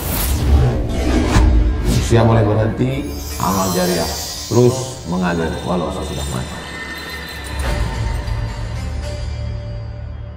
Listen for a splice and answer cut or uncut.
uncut